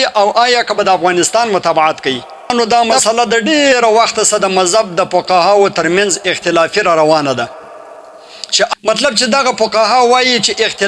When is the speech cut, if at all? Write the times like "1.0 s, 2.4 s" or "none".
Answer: 2.5 s, 8.7 s